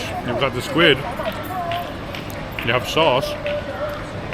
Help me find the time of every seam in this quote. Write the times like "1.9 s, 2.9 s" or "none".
none